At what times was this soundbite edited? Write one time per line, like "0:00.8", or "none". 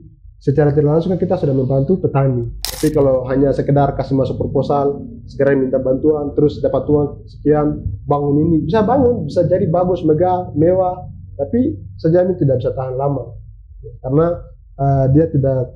0:02.6